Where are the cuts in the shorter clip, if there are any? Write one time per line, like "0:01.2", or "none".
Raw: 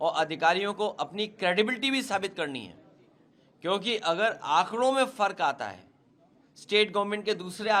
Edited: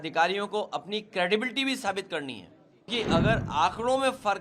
0:02.9